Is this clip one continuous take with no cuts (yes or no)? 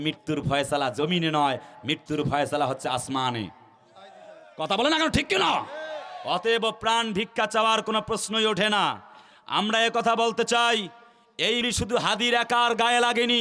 no